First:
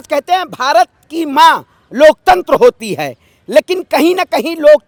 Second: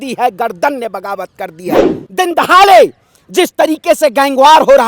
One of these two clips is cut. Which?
second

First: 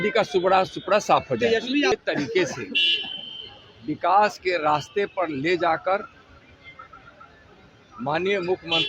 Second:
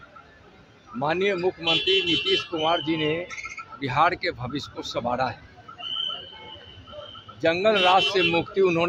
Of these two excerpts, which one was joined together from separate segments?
first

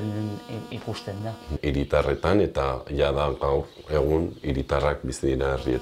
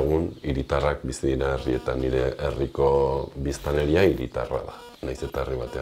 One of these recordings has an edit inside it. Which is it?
first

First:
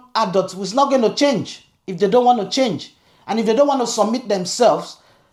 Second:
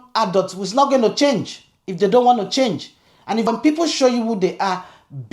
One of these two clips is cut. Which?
second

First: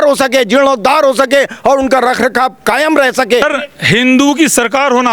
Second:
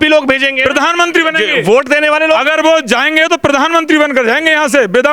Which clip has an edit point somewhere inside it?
first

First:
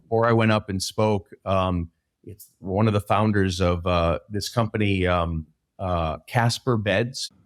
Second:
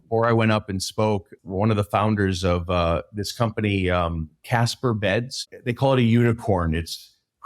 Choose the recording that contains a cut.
second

